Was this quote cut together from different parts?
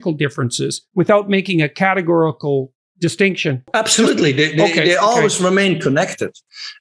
yes; 1 cut; at 3.7 s

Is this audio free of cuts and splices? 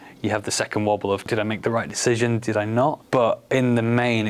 no; 2 cuts; at 1.3 s, 3.0 s

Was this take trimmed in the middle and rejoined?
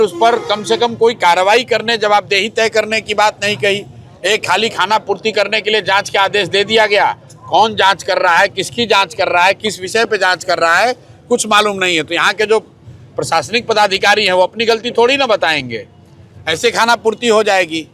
no; 0 cuts

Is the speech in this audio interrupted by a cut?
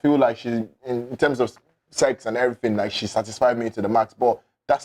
no; 0 cuts

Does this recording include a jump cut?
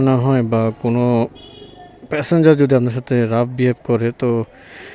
no; 0 cuts

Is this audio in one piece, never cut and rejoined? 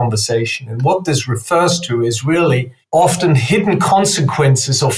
no; 1 cut; at 2.7 s

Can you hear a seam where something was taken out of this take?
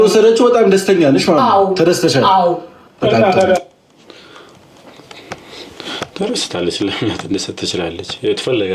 no; 0 cuts

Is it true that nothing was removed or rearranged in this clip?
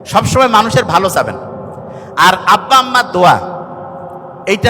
yes; 0 cuts

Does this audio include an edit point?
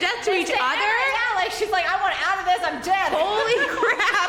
no; 0 cuts

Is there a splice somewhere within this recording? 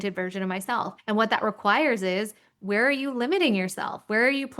yes; 1 cut; at 1.0 s

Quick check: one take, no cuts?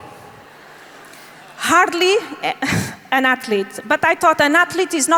yes; 0 cuts

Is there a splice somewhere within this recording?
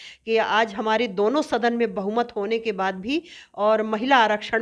no; 0 cuts

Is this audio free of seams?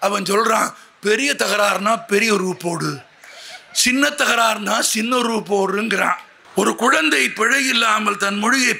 no; 1 cut; at 6.3 s

